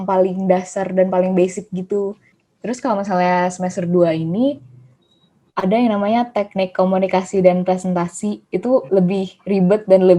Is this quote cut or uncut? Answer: cut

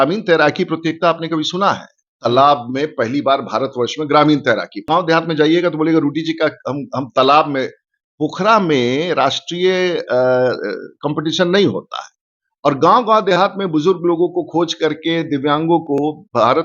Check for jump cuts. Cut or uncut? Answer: cut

